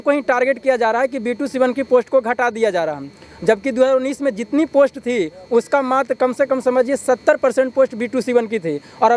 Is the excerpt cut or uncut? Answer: uncut